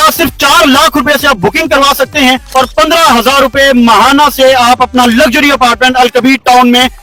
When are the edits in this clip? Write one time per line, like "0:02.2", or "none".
none